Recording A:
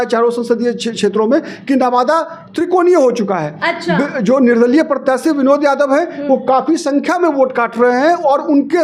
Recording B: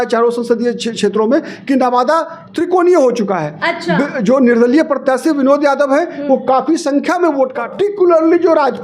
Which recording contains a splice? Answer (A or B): B